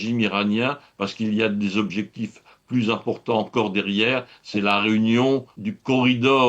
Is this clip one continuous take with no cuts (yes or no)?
no